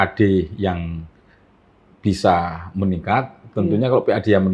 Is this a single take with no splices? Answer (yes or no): yes